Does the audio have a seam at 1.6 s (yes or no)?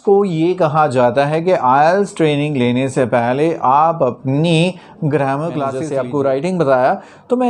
no